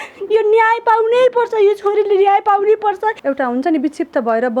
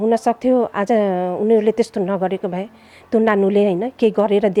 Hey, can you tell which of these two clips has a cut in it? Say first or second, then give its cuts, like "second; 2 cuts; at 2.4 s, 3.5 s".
first; 1 cut; at 3.2 s